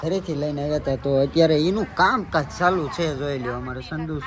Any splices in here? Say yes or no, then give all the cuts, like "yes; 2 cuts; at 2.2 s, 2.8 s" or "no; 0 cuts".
no; 0 cuts